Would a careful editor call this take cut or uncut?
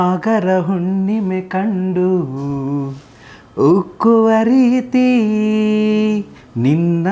uncut